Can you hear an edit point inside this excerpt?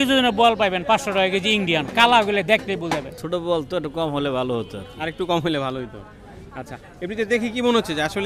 yes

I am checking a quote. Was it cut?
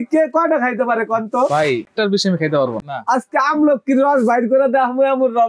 yes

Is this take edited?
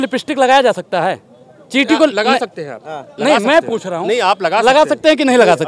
no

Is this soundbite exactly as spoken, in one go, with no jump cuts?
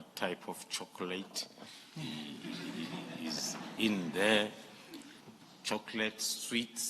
no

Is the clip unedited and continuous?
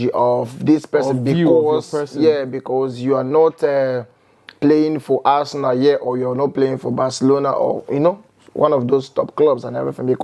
yes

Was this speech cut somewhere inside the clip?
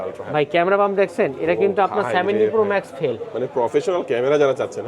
no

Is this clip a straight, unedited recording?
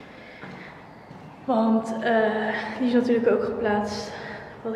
yes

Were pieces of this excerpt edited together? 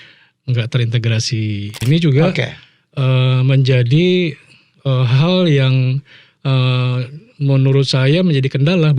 yes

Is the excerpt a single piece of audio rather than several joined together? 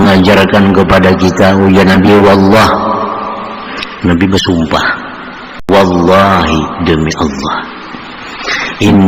no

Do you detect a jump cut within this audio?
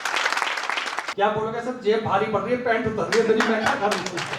yes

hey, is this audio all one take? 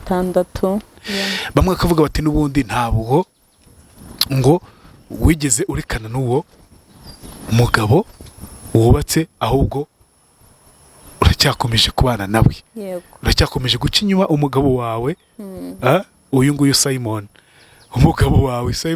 no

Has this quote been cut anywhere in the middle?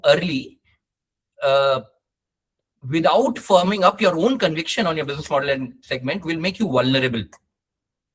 no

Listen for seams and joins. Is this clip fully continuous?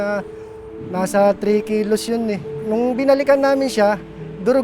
no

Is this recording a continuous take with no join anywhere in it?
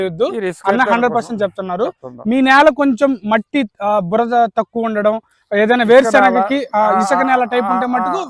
yes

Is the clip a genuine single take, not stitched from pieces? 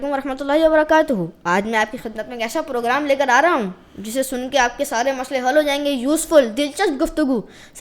yes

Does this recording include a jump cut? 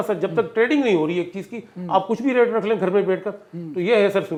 no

